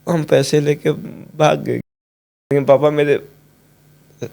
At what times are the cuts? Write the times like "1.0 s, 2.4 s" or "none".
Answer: 2.5 s

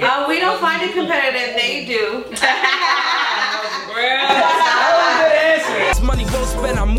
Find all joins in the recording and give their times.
5.9 s

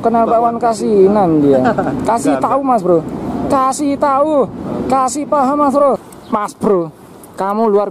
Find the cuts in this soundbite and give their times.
6.1 s

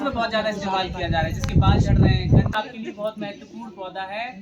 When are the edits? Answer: 2.5 s

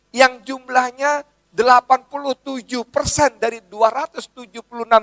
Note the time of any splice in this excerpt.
none

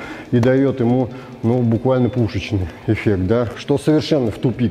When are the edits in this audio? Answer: 3.6 s

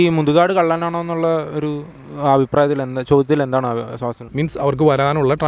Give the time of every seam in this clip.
4.2 s

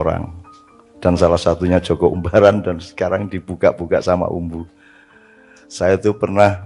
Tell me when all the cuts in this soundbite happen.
none

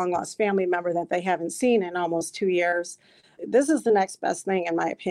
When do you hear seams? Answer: 3.4 s

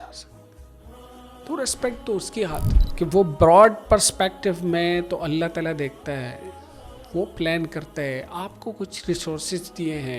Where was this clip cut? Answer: 2.8 s

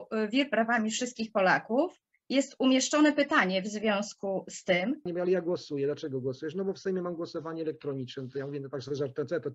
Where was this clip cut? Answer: 5.1 s

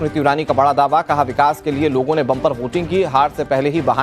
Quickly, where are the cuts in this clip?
2.8 s

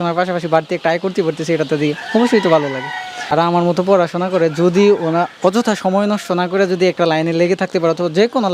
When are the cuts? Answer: 3.3 s

